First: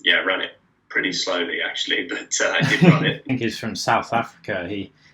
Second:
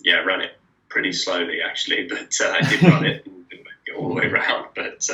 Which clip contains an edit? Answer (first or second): first